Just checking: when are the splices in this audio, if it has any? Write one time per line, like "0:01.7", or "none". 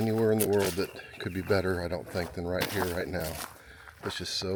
none